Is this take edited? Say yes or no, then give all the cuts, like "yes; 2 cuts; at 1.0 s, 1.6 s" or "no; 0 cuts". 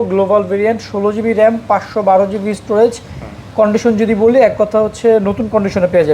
no; 0 cuts